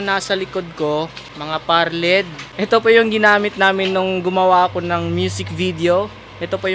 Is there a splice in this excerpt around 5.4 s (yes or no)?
no